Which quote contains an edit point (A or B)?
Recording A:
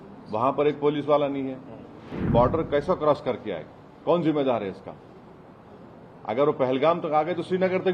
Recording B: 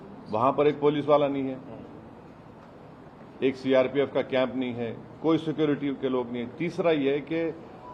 A